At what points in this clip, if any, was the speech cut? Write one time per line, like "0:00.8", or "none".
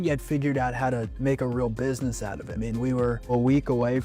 0:01.1
0:02.5